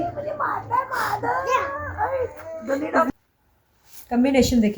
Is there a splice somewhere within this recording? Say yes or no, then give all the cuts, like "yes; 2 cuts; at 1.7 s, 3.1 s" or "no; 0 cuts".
yes; 1 cut; at 3.1 s